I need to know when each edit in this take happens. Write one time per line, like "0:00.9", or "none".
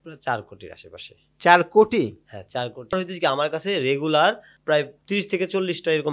0:02.9